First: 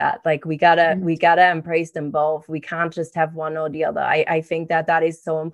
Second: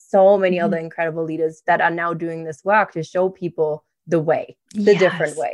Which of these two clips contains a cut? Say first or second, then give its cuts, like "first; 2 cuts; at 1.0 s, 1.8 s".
second; 1 cut; at 4.6 s